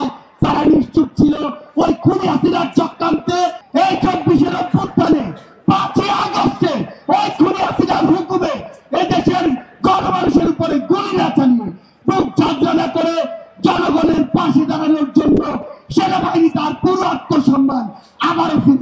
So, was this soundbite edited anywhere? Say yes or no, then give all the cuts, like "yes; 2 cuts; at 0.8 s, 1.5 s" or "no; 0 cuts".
yes; 1 cut; at 3.6 s